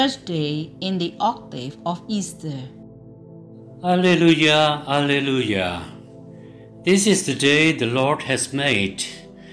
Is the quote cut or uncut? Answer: cut